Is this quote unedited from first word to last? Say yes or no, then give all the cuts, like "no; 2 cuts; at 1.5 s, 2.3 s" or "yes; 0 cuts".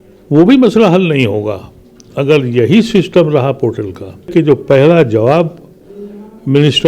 no; 1 cut; at 4.3 s